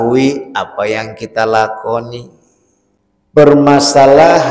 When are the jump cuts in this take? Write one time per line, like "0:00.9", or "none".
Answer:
0:03.4